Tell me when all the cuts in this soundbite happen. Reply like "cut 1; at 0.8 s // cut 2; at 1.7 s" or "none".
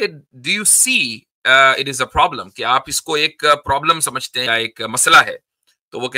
cut 1; at 4.5 s